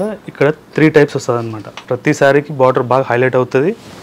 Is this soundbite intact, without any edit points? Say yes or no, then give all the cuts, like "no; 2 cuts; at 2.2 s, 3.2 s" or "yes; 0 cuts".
no; 1 cut; at 1.7 s